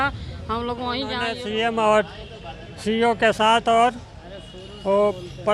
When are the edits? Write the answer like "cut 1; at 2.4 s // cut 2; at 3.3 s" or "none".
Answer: cut 1; at 1.3 s